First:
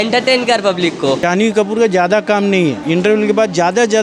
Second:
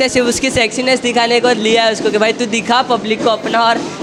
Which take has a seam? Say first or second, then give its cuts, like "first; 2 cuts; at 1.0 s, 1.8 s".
first; 2 cuts; at 1.2 s, 2.8 s